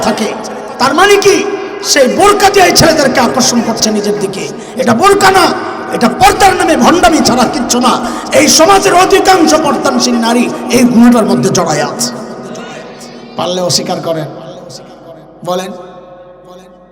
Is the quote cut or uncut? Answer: uncut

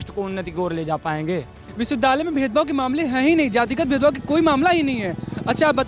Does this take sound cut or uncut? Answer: uncut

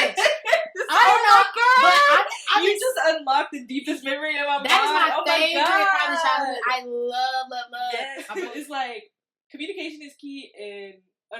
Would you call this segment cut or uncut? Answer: cut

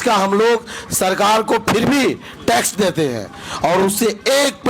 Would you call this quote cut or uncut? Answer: uncut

